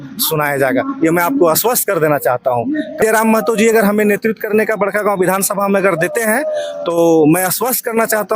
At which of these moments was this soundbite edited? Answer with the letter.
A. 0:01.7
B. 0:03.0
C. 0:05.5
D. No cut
B